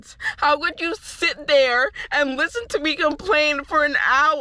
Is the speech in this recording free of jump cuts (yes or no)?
yes